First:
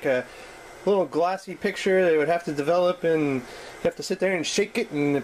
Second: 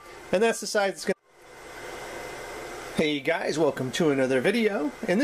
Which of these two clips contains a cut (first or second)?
second